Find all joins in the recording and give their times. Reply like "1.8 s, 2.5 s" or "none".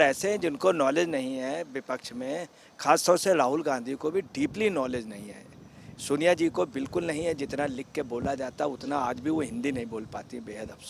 none